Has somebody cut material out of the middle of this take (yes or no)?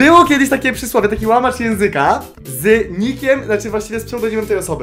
no